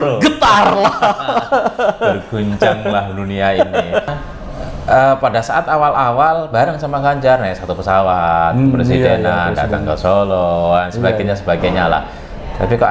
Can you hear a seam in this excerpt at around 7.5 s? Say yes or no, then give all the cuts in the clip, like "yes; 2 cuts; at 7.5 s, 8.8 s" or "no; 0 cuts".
no; 1 cut; at 4.1 s